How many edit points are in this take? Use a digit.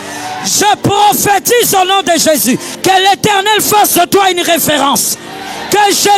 1